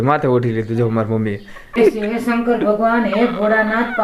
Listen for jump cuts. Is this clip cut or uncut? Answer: cut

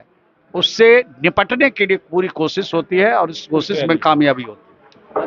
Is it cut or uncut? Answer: uncut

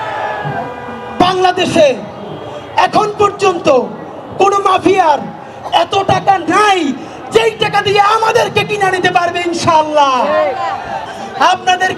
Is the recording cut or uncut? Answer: cut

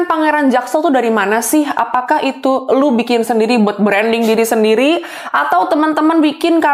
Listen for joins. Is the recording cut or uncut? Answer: uncut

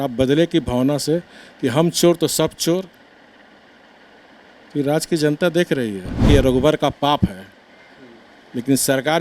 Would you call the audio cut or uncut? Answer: cut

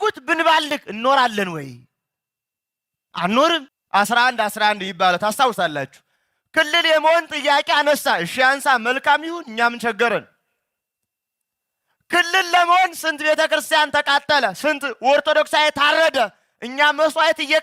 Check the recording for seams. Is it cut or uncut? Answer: cut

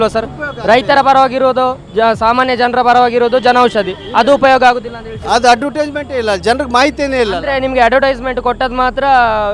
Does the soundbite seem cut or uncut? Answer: uncut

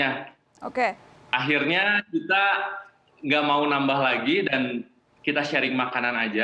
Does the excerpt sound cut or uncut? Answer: uncut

